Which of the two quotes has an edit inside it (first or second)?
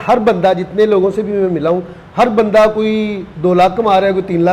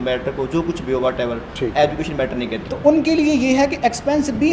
second